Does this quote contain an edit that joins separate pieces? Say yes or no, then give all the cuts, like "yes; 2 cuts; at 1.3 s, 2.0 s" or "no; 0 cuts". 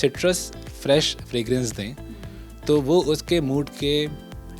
no; 0 cuts